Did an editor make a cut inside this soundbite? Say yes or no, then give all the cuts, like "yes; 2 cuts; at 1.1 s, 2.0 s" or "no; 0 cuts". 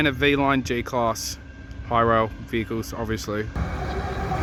no; 0 cuts